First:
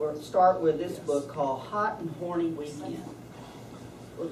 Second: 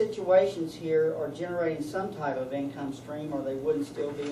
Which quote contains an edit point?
second; 1 cut; at 2.1 s

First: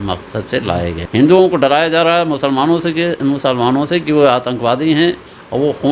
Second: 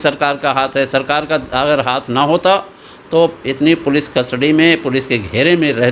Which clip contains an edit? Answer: first; 1 cut; at 1.0 s

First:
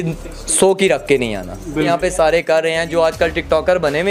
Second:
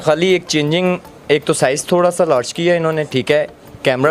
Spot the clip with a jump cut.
first; 1 cut; at 1.9 s

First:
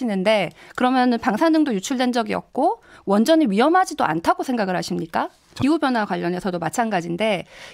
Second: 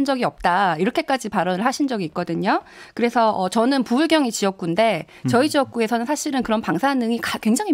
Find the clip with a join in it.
first; 1 cut; at 5.5 s

